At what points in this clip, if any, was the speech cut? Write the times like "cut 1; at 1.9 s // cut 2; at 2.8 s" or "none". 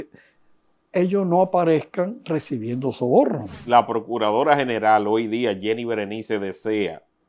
cut 1; at 3.6 s